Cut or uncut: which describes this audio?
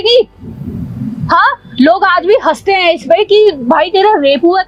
uncut